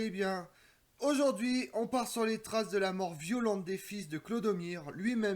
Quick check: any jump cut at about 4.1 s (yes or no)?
no